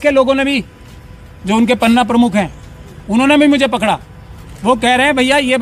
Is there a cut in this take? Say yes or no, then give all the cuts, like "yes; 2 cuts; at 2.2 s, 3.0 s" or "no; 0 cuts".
no; 0 cuts